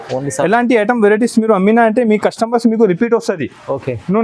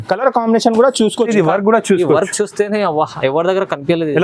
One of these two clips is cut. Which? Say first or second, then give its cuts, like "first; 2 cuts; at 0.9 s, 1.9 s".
second; 1 cut; at 1.3 s